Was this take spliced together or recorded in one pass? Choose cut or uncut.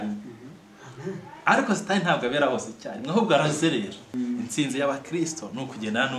cut